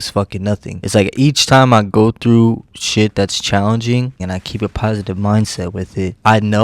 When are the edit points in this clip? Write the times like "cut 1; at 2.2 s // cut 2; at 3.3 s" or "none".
cut 1; at 4.2 s